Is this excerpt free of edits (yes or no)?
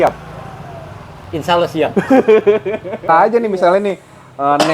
no